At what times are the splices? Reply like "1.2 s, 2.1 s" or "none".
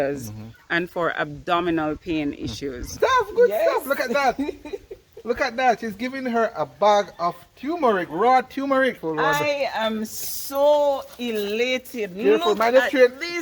2.9 s, 9.0 s